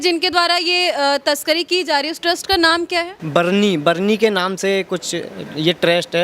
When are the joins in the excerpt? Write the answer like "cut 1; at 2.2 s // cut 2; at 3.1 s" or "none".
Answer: cut 1; at 3.2 s